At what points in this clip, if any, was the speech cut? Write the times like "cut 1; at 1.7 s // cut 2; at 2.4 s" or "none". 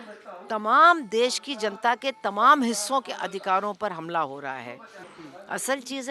cut 1; at 5.0 s

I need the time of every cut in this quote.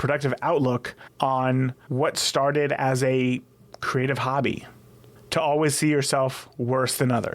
cut 1; at 1.0 s // cut 2; at 1.8 s

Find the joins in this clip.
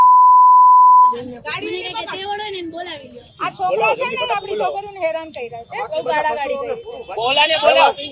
cut 1; at 3.3 s // cut 2; at 7.0 s

